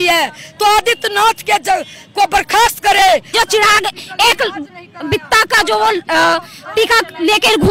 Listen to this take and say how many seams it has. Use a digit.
1